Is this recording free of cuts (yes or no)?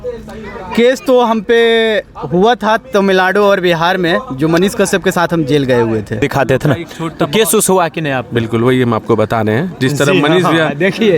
no